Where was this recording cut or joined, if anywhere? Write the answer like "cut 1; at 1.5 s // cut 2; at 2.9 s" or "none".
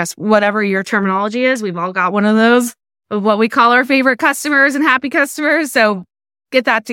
none